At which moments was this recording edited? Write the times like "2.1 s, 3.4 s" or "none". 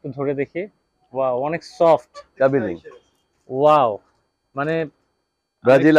2.3 s